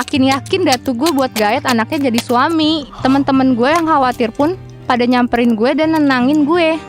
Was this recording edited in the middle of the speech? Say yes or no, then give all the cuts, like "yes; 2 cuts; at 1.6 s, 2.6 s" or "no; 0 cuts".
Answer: yes; 1 cut; at 2.9 s